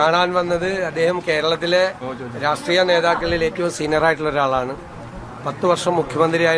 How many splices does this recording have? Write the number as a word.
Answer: zero